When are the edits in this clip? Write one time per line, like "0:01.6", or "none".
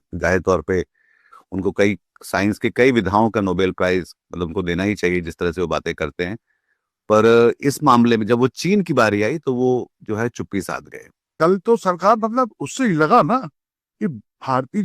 0:11.3

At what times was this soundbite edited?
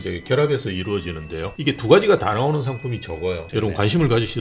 0:01.4
0:03.4

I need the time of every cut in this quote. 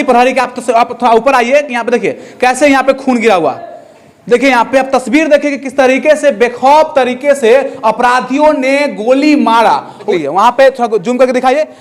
0:09.9

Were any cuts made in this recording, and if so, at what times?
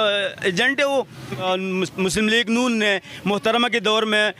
0:01.4

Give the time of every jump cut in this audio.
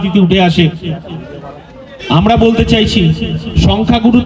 none

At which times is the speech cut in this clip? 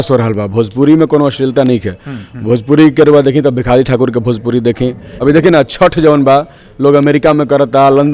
0:05.1

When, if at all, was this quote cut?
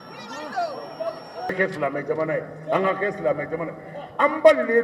0:01.5

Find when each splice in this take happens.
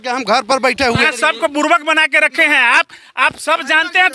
0:01.0

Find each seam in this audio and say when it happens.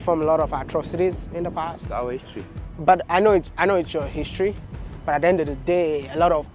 0:01.8

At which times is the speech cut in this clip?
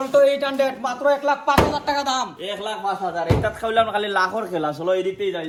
none

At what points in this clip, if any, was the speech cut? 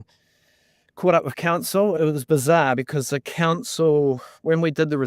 0:01.9

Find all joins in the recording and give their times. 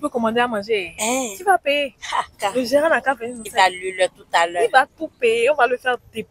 0:02.3
0:03.4

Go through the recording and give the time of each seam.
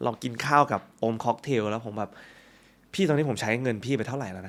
none

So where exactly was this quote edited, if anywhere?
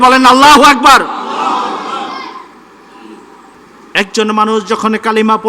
0:03.5

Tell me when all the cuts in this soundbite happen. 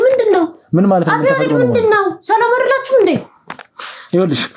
none

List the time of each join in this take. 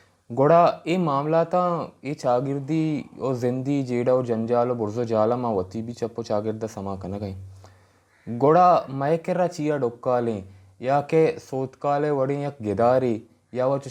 none

